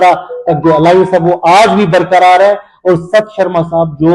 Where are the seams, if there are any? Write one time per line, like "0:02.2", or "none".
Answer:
none